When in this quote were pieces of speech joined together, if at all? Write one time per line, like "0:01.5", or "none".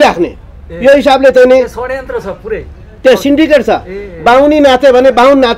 none